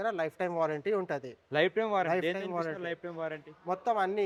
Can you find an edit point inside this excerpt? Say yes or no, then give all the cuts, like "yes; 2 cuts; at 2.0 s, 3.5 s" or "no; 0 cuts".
no; 0 cuts